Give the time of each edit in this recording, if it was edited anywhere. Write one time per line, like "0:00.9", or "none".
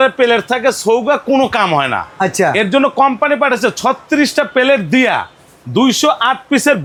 none